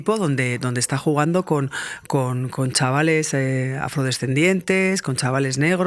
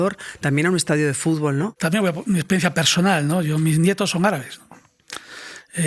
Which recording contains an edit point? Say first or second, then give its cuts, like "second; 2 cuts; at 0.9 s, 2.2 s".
second; 1 cut; at 1.7 s